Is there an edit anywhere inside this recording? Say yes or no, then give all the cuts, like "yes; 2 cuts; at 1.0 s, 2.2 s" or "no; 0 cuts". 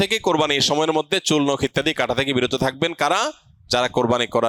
no; 0 cuts